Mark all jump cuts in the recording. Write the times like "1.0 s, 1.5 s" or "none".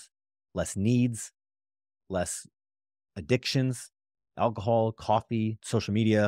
none